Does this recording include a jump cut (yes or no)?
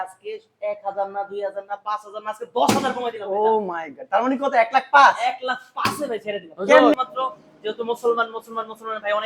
yes